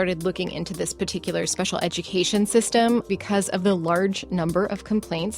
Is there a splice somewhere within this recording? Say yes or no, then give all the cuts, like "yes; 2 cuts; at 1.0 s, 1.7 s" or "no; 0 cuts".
yes; 1 cut; at 3.1 s